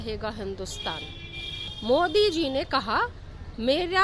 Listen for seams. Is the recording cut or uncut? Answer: cut